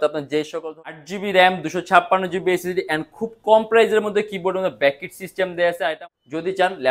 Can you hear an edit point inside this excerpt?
yes; 2 cuts; at 1.0 s, 5.9 s

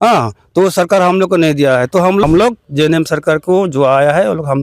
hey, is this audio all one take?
no; 1 cut; at 2.2 s

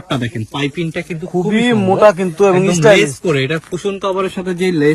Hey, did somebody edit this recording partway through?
no; 0 cuts

